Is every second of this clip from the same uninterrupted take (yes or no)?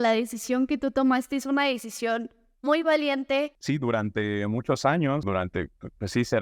no